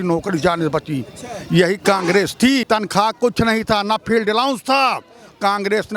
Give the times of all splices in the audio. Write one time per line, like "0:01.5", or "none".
0:02.6